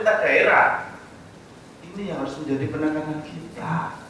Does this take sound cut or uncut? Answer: uncut